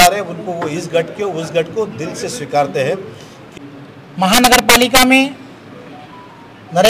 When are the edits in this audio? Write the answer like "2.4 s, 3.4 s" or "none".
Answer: 3.4 s